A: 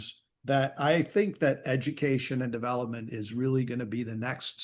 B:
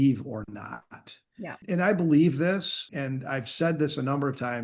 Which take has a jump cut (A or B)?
B